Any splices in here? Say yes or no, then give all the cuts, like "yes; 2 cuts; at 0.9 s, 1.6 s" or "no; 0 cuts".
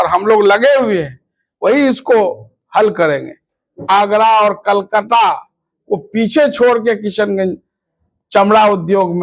yes; 1 cut; at 3.9 s